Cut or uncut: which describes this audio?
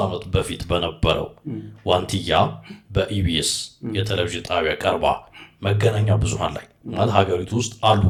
uncut